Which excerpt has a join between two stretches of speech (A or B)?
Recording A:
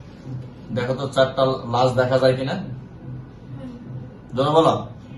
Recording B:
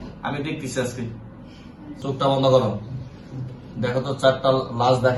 B